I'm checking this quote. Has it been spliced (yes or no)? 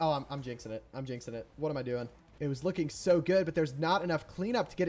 yes